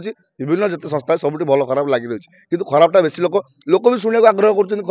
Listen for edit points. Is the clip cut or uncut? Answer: uncut